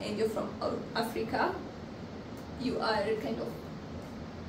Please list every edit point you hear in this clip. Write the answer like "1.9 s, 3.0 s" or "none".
none